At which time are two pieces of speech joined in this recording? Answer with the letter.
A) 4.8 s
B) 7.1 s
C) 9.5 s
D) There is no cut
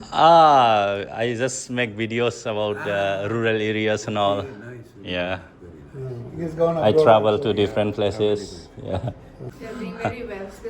C